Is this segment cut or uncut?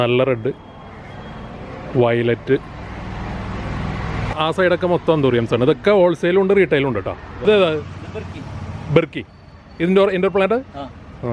cut